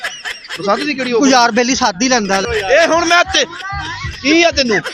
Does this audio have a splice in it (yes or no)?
yes